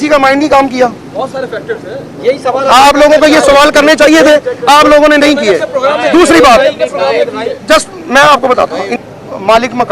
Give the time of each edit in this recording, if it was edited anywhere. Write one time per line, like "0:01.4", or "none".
0:08.9